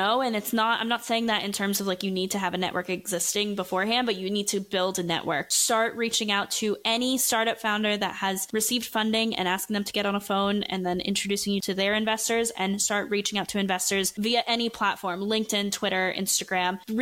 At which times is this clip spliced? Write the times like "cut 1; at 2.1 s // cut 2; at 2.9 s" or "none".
cut 1; at 5.5 s // cut 2; at 11.6 s